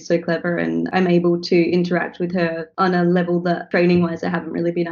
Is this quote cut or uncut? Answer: cut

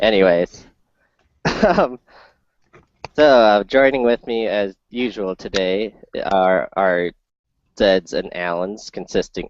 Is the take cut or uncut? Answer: cut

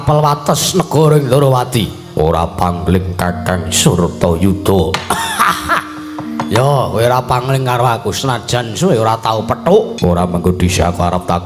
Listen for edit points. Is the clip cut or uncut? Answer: cut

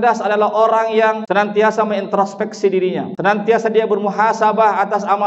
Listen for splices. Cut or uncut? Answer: cut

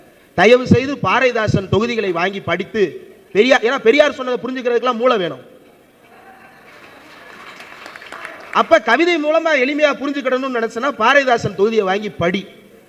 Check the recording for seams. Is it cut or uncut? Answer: uncut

